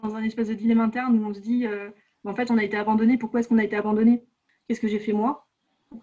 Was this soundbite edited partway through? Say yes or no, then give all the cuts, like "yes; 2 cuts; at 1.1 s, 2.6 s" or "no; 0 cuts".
yes; 1 cut; at 4.5 s